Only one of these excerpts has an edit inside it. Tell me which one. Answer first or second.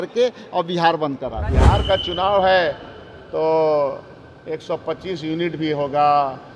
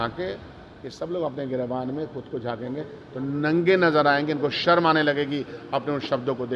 first